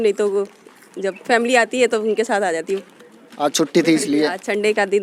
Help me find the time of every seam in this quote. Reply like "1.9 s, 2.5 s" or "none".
none